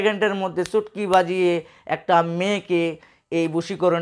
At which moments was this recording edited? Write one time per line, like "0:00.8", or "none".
none